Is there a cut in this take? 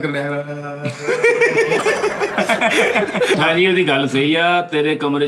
yes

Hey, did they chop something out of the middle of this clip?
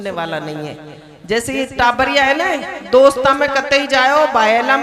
no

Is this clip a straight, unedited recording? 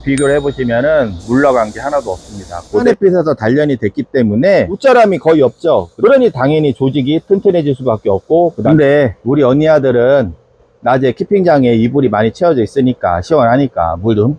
no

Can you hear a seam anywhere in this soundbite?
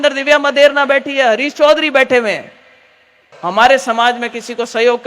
yes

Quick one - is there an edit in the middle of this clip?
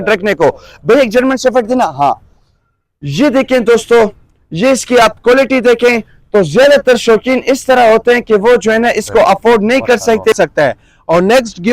yes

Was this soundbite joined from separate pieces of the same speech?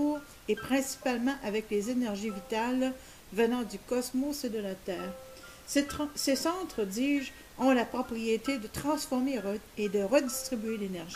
yes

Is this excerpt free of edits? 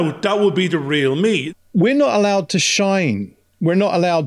no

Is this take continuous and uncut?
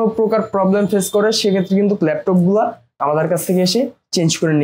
yes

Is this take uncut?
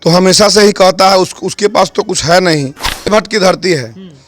no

